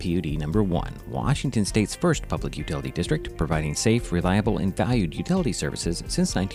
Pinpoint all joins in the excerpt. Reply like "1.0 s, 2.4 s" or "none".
none